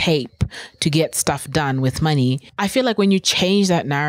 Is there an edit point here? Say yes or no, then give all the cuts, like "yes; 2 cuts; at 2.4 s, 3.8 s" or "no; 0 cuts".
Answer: yes; 1 cut; at 2.5 s